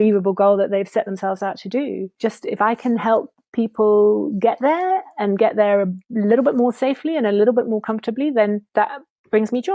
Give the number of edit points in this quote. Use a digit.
0